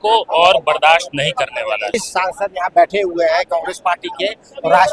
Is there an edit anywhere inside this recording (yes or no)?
yes